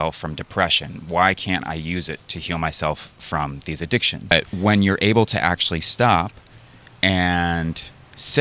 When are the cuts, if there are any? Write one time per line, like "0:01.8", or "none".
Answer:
0:04.5